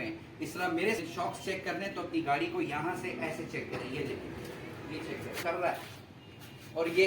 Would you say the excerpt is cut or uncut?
cut